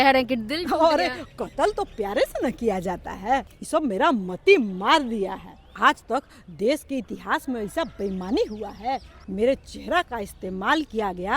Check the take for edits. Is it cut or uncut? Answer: cut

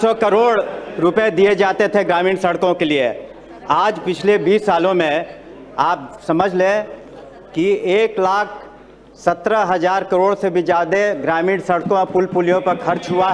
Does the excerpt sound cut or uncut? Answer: uncut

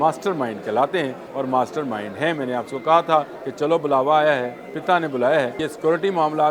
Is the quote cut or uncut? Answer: cut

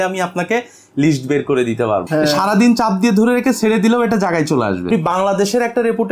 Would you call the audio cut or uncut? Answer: cut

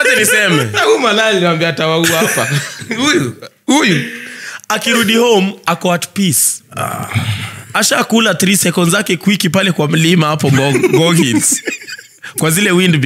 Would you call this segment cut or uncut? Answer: uncut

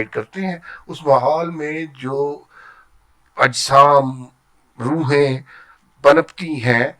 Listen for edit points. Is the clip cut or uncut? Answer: uncut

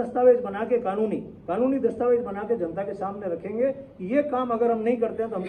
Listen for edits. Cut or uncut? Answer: uncut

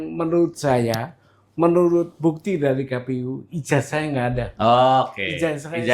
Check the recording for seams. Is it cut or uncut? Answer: uncut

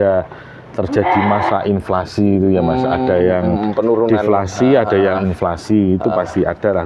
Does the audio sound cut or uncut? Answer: uncut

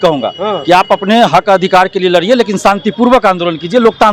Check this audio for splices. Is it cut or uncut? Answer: uncut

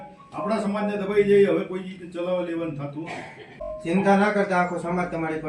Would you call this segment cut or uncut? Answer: cut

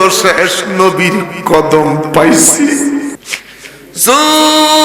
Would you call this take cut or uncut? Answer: cut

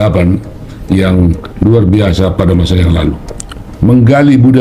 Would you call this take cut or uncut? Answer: cut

